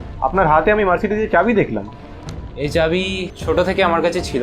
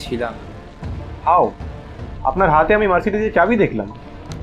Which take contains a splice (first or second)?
first